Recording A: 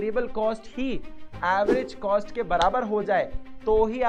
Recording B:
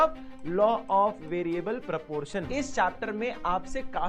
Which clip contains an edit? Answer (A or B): B